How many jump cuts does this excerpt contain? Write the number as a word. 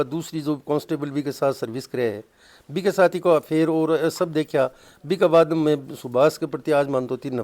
zero